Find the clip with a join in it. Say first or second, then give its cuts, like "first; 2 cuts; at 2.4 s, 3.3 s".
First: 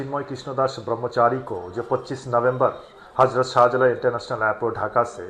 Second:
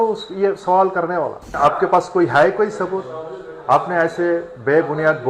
second; 1 cut; at 1.5 s